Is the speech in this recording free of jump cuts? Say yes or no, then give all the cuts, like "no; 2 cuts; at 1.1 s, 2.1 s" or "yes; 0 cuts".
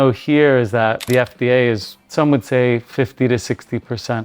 no; 2 cuts; at 1.1 s, 2.0 s